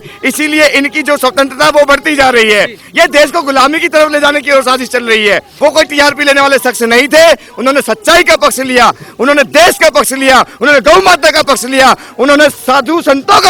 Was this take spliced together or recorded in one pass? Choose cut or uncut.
cut